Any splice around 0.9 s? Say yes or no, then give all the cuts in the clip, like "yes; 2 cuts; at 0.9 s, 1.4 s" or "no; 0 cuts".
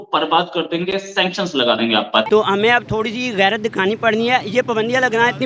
no; 1 cut; at 2.3 s